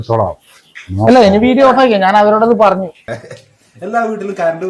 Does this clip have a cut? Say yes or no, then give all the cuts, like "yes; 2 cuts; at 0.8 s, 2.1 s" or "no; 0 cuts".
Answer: yes; 1 cut; at 3.0 s